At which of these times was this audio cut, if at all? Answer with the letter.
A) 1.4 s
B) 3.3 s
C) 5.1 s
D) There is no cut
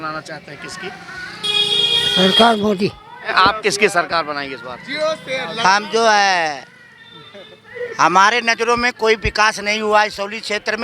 B